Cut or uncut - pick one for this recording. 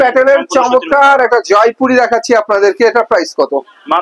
uncut